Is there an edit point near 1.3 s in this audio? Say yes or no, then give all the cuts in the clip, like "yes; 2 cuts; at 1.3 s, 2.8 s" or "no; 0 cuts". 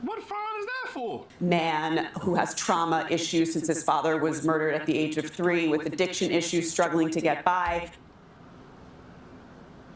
yes; 1 cut; at 1.3 s